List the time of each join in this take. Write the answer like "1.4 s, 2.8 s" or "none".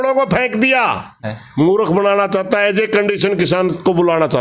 1.3 s